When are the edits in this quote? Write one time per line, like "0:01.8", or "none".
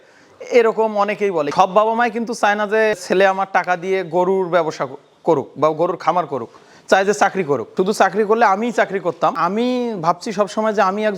0:01.5
0:03.0
0:07.7
0:09.3